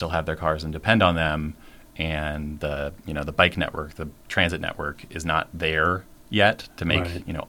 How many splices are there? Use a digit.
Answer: 0